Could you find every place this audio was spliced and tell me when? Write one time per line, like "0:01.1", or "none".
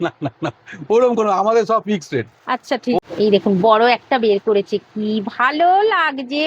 0:03.0

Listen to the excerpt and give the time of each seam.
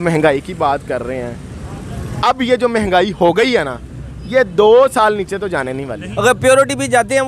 0:06.0

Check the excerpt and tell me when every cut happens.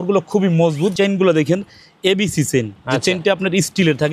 0:00.9

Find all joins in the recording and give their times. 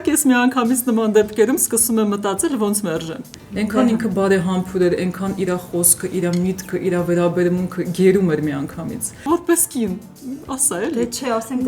0:03.3
0:09.2

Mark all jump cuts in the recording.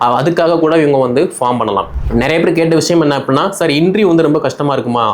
0:01.9

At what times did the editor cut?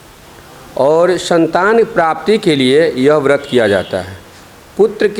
none

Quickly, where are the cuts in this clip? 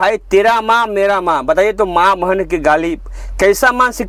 none

